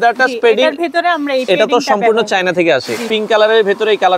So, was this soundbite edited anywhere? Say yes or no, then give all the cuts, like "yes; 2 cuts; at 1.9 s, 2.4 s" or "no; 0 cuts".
yes; 1 cut; at 3.1 s